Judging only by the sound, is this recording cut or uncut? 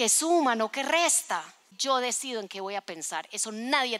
cut